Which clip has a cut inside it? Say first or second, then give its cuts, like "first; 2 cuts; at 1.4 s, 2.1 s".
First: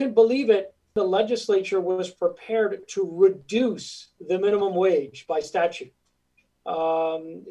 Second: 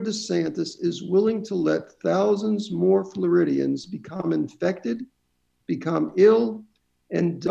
first; 1 cut; at 0.9 s